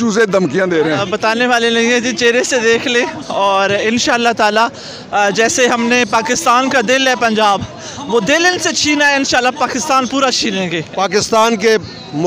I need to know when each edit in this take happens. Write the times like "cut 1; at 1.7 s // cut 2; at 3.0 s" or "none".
cut 1; at 1.0 s // cut 2; at 10.9 s